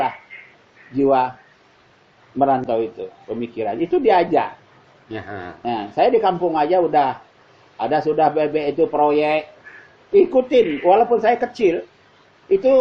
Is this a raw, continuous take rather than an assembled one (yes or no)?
yes